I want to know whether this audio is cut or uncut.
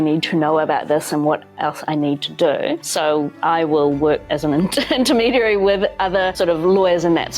cut